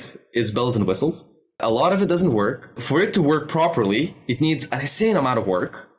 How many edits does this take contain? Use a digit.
2